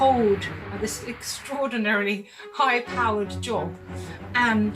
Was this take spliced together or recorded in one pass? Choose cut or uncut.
uncut